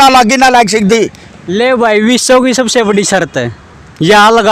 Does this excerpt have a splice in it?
no; 0 cuts

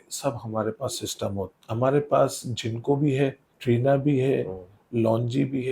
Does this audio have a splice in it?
yes; 2 cuts; at 1.5 s, 3.5 s

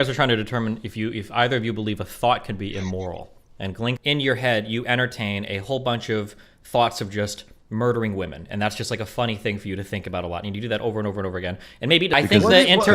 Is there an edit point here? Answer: yes; 2 cuts; at 4.0 s, 12.1 s

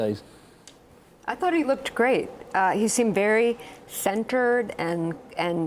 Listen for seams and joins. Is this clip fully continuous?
no; 1 cut; at 4.7 s

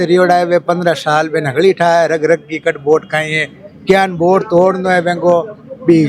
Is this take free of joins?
yes; 0 cuts

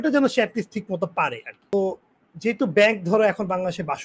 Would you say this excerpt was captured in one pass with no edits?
no; 1 cut; at 1.7 s

